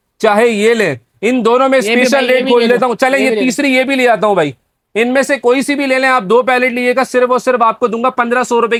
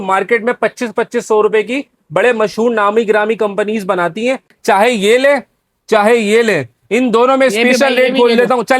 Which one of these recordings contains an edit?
second; 1 cut; at 4.5 s

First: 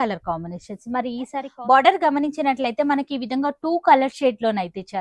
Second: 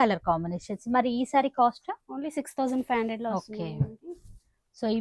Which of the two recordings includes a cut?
first; 1 cut; at 1.4 s

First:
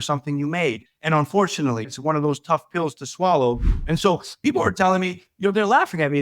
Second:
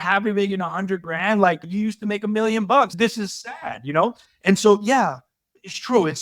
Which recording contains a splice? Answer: first; 1 cut; at 3.8 s

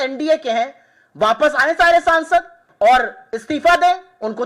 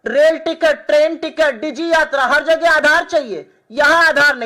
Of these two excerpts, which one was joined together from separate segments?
first; 1 cut; at 2.6 s

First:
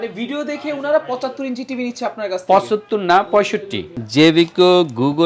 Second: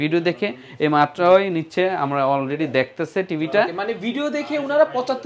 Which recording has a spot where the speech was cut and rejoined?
first; 1 cut; at 3.8 s

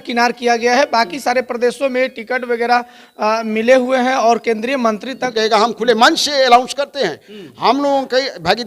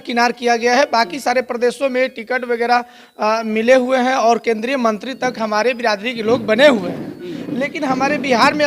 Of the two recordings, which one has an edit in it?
first; 1 cut; at 5.3 s

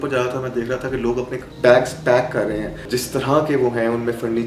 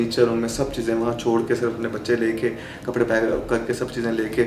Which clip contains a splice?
first; 2 cuts; at 1.4 s, 2.8 s

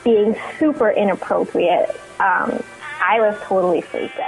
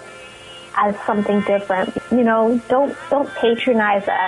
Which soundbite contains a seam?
second; 1 cut; at 2.0 s

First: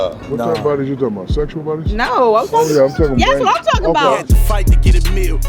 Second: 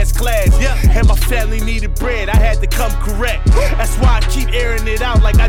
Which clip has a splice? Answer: first; 1 cut; at 4.3 s

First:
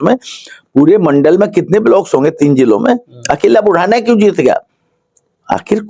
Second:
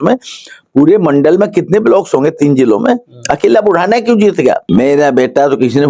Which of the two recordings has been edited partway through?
second; 1 cut; at 4.6 s

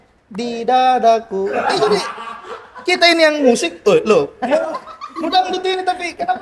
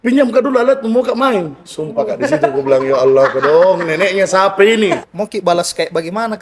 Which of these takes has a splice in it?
second; 1 cut; at 5.0 s

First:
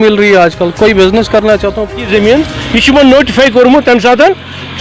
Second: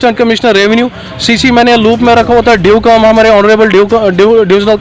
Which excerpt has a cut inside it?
first; 1 cut; at 1.9 s

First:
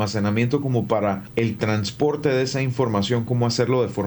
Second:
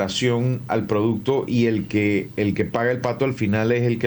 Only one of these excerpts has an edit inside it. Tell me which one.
first; 1 cut; at 1.2 s

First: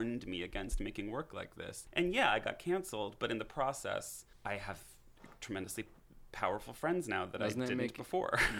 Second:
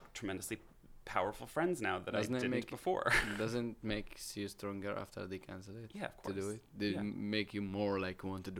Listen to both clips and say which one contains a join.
first; 2 cuts; at 1.7 s, 4.2 s

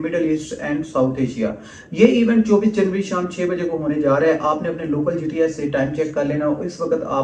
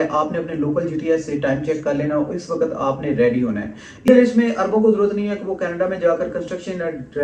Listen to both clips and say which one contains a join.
second; 1 cut; at 4.1 s

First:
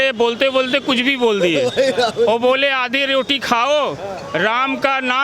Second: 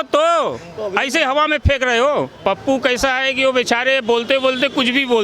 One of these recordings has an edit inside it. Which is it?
second; 1 cut; at 2.3 s

